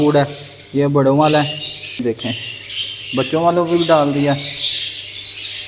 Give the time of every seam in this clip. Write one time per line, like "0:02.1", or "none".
0:02.0